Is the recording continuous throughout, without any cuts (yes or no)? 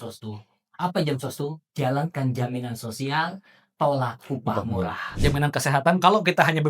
no